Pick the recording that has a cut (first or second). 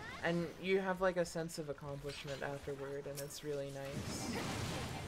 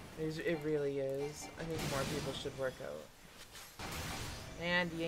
second